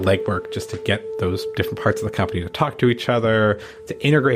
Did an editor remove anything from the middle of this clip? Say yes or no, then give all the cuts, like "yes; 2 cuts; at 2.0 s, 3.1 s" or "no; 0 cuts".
no; 0 cuts